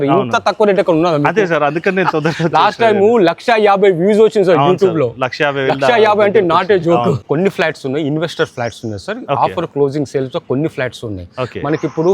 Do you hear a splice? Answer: yes; 1 cut; at 7.2 s

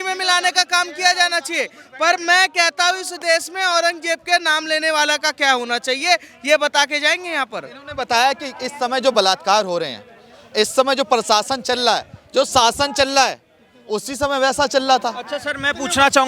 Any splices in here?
no; 0 cuts

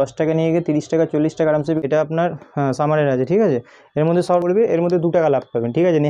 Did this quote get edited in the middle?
yes; 2 cuts; at 1.8 s, 4.4 s

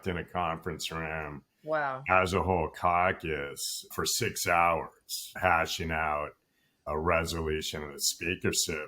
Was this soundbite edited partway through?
yes; 1 cut; at 3.9 s

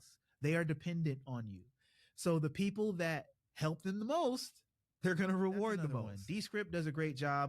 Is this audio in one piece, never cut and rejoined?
no; 1 cut; at 6.1 s

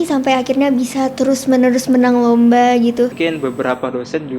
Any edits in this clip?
yes; 1 cut; at 3.1 s

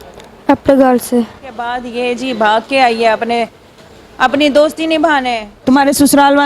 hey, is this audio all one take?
no; 2 cuts; at 1.8 s, 5.5 s

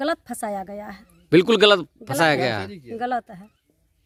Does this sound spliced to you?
no; 0 cuts

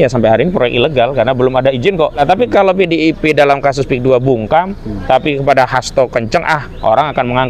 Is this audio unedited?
no; 1 cut; at 2.2 s

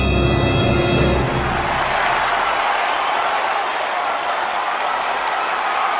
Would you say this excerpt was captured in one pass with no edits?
no; 1 cut; at 1.4 s

